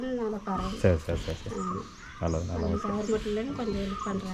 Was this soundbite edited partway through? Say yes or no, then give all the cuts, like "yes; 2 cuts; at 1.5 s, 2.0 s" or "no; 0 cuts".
no; 0 cuts